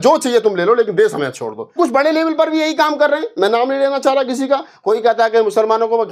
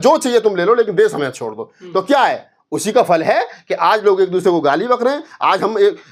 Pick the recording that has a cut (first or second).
first